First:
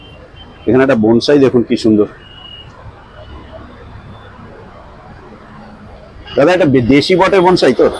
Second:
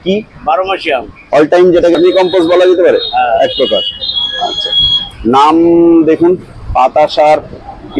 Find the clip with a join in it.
second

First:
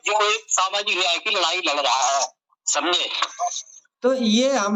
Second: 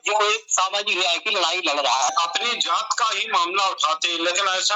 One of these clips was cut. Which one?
second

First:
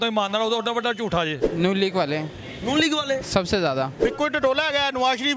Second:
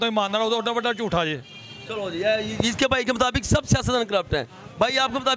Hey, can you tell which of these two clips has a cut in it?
first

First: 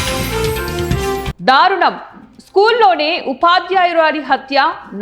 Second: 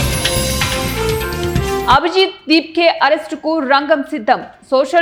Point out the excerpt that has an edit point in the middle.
first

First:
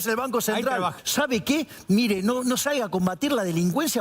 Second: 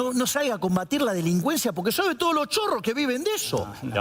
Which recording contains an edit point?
first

